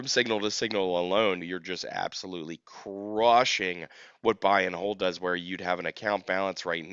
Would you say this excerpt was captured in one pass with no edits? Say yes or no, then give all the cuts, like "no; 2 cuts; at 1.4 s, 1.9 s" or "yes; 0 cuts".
no; 1 cut; at 1.4 s